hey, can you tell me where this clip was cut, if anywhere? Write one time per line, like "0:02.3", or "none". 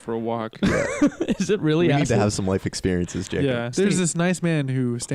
0:03.7